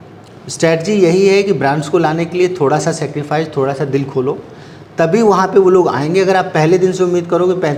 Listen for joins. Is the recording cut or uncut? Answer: uncut